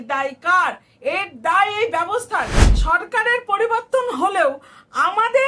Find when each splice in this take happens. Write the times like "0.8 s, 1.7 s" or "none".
2.6 s